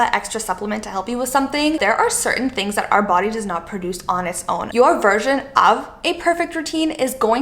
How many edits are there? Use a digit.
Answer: 2